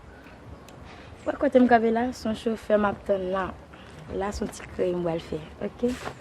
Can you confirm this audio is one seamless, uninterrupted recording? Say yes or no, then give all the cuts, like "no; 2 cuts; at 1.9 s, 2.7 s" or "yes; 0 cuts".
yes; 0 cuts